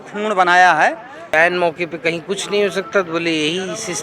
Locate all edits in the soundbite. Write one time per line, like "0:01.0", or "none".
0:01.3